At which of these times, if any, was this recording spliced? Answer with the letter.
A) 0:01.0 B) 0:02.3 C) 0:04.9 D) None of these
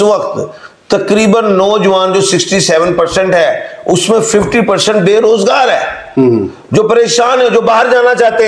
D